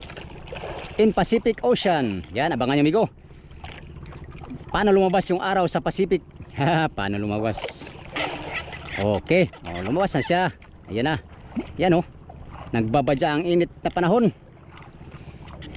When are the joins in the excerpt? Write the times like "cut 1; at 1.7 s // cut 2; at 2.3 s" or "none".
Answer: none